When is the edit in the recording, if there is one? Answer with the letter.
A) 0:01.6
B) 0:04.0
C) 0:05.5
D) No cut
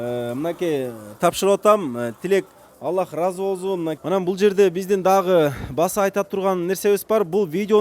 B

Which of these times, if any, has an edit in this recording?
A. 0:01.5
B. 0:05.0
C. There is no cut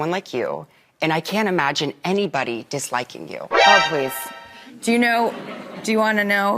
A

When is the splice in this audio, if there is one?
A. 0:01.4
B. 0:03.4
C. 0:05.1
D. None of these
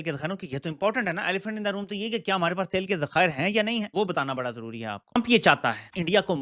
D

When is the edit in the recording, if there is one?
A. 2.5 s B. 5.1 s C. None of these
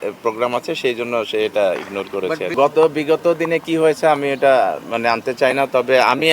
A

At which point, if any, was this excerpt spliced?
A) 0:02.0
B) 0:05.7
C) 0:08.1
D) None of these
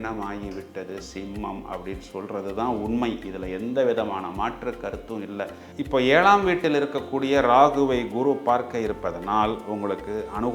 B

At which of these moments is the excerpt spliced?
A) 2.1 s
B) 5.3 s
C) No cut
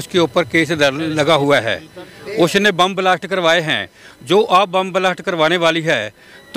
C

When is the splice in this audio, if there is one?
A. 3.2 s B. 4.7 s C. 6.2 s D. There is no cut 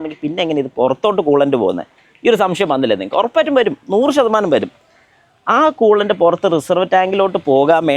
D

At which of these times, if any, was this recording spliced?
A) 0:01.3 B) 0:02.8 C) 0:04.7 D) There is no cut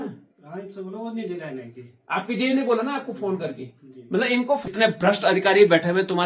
C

